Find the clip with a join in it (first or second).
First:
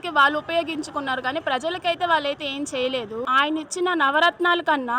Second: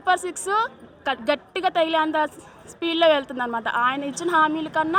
first